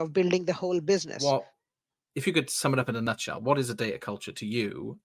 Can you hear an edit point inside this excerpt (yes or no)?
yes